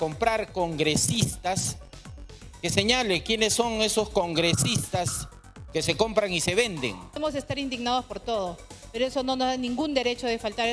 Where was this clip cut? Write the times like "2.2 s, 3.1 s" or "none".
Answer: 7.2 s